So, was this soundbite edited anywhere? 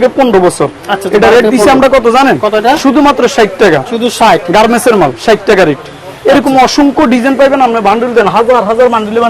no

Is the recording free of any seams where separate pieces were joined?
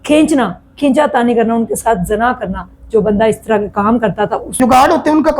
no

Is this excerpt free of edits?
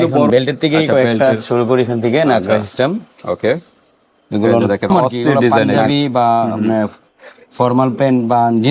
no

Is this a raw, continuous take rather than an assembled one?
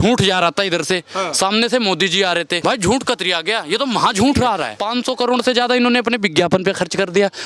no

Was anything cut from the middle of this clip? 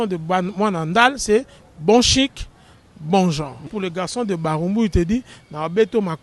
yes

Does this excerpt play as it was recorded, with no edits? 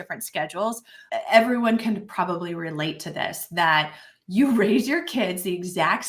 no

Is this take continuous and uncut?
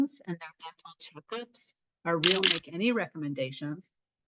no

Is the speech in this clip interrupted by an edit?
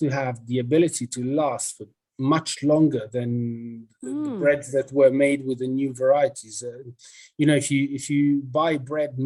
no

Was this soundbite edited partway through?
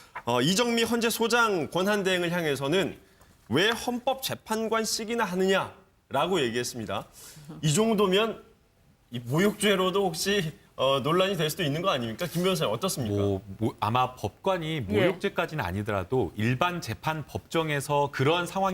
yes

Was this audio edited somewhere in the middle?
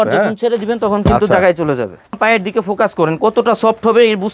yes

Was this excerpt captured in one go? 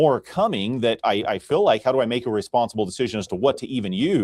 yes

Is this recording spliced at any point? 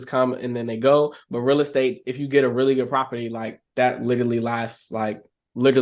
no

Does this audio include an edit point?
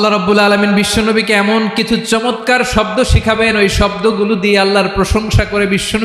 no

